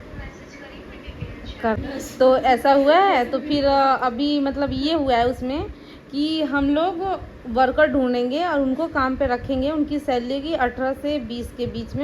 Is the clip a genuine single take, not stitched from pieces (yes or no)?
no